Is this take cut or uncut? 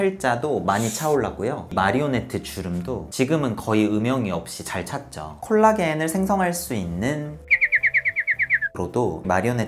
uncut